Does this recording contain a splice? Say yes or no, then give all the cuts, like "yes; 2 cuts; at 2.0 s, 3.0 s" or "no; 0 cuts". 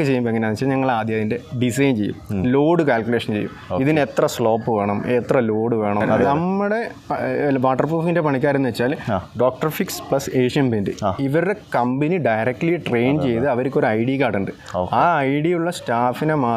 yes; 1 cut; at 6.1 s